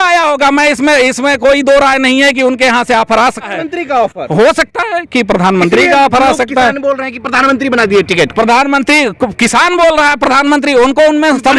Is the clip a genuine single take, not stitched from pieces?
no; 1 cut; at 3.6 s

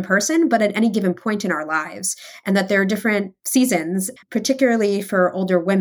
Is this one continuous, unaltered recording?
no; 1 cut; at 4.1 s

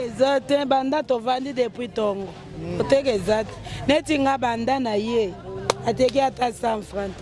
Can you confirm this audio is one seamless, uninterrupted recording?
yes; 0 cuts

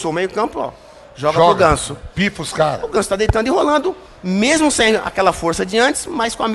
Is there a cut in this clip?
no; 0 cuts

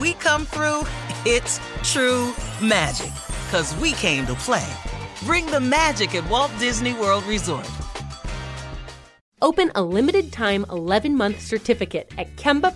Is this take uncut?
no; 1 cut; at 9.1 s

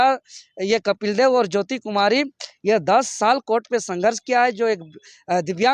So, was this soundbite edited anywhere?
no; 0 cuts

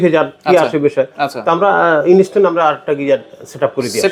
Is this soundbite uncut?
yes; 0 cuts

